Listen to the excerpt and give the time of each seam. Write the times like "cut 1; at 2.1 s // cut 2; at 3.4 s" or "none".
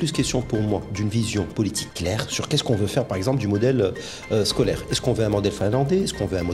none